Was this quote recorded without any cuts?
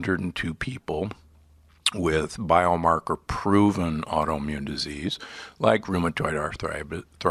yes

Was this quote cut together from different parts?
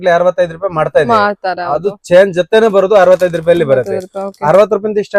no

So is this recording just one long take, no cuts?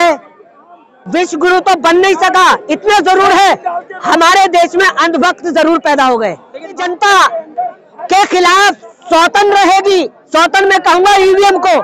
no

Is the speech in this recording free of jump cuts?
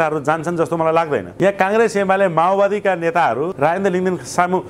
no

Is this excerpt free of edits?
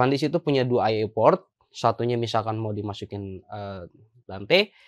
yes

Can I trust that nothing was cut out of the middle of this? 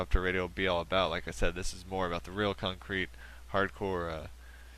yes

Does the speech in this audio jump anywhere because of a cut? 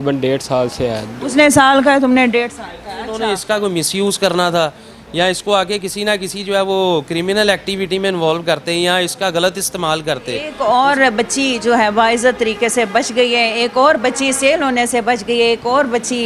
yes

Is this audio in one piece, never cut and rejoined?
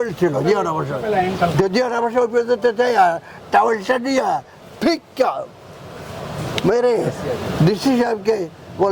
yes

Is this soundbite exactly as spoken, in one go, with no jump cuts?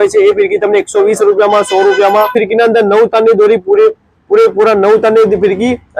no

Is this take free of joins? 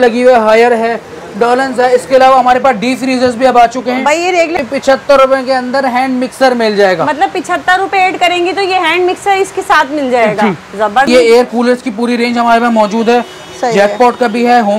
no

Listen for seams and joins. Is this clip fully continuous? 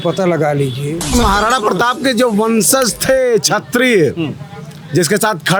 no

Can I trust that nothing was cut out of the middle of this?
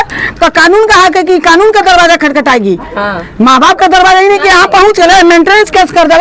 yes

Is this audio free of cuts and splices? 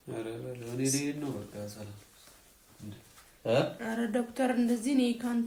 yes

